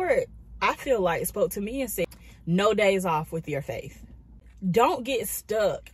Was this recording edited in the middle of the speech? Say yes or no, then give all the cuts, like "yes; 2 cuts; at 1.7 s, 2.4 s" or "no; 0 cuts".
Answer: yes; 2 cuts; at 2.1 s, 4.5 s